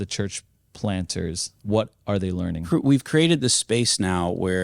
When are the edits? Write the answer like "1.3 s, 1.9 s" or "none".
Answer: 1.5 s, 2.6 s